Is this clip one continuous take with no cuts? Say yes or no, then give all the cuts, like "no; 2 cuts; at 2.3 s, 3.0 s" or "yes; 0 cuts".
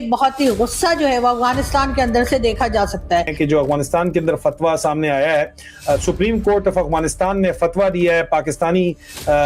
no; 1 cut; at 3.4 s